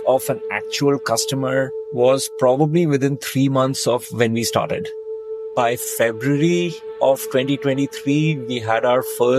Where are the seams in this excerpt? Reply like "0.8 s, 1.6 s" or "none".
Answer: 5.4 s